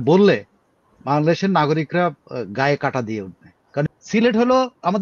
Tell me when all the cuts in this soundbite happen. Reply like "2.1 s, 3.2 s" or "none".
3.8 s

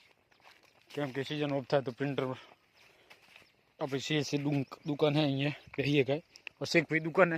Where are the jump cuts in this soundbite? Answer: none

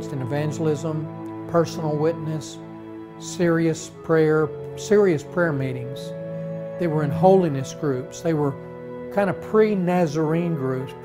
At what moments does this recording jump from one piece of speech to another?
7.4 s

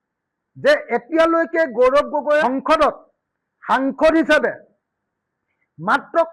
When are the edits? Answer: 2.4 s

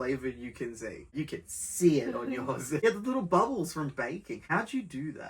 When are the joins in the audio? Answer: 1.1 s, 2.8 s, 4.4 s

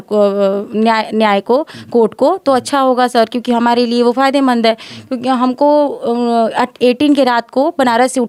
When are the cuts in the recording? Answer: none

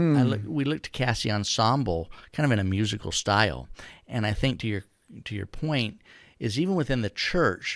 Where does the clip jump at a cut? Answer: none

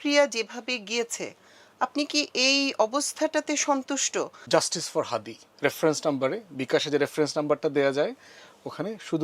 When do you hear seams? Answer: 4.4 s

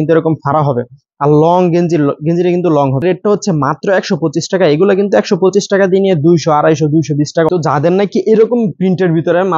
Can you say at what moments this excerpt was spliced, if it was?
3.0 s, 7.5 s

